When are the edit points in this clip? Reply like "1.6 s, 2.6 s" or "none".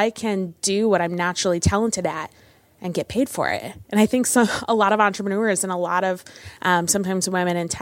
1.6 s

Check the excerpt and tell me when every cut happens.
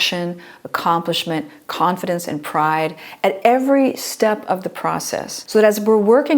5.3 s

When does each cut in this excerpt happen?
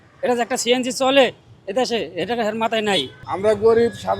3.2 s

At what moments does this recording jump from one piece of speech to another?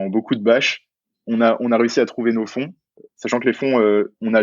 1.1 s

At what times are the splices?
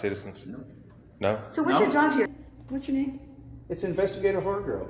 2.3 s

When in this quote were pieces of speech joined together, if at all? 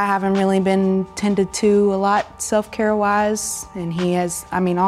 none

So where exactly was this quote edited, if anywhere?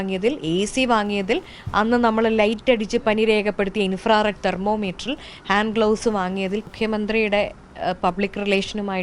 6.7 s

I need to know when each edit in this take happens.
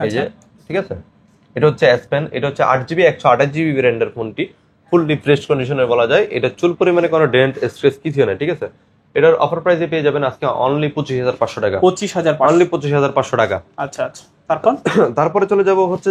none

